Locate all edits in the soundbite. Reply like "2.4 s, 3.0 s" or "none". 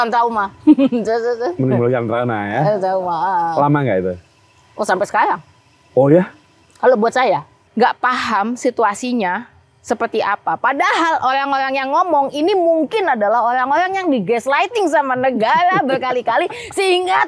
7.6 s